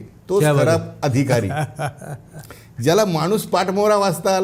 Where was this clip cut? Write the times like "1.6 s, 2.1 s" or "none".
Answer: none